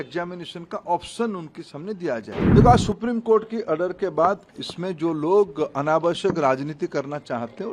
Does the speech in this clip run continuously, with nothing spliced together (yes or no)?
no